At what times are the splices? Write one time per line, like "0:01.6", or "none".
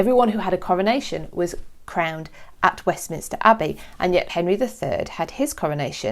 0:04.3